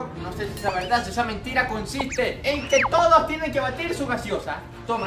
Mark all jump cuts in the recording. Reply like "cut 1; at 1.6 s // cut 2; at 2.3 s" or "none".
none